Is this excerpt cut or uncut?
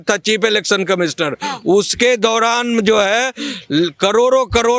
uncut